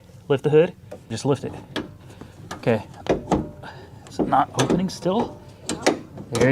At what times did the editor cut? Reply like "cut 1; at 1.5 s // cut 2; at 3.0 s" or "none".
cut 1; at 1.2 s